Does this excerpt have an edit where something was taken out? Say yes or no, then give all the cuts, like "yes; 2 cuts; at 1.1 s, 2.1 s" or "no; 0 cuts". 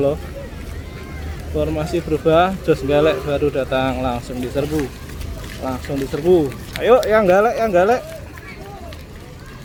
no; 0 cuts